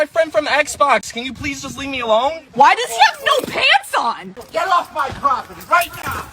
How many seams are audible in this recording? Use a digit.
1